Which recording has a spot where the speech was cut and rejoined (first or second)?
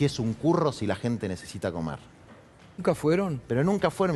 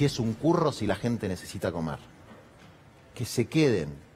first